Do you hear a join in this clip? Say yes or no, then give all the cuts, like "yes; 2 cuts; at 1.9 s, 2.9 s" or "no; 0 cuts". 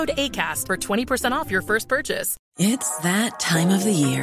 yes; 1 cut; at 2.4 s